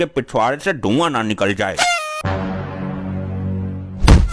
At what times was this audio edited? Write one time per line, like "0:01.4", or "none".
0:02.2